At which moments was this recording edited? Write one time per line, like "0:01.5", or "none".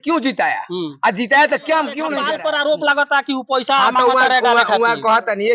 0:02.2